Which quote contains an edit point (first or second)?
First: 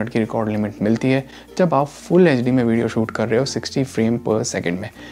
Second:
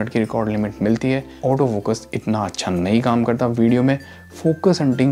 second